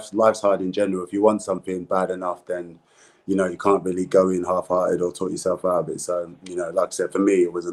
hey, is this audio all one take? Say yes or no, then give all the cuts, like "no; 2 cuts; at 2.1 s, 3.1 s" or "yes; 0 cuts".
yes; 0 cuts